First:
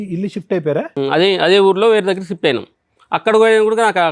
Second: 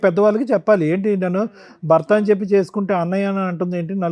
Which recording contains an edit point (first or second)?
first